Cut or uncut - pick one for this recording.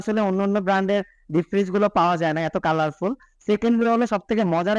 uncut